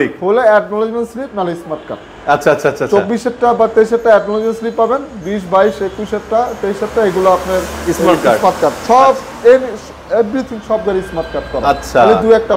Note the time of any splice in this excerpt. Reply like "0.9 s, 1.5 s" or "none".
none